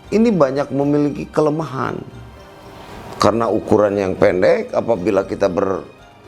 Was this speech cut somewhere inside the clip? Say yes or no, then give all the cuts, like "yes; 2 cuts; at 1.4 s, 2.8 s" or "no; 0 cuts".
no; 0 cuts